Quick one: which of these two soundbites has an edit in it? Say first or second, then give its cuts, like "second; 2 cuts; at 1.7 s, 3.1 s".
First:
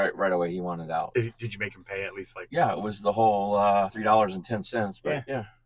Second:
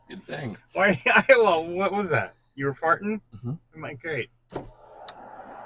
first; 3 cuts; at 1.1 s, 2.4 s, 4.0 s